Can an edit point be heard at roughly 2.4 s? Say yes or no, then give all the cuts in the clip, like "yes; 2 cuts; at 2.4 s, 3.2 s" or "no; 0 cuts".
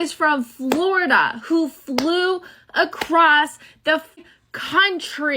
no; 1 cut; at 4.2 s